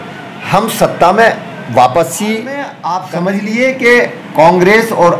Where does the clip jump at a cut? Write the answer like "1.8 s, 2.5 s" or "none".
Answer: 2.8 s